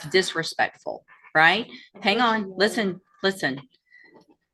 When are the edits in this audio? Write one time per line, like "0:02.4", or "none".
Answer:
none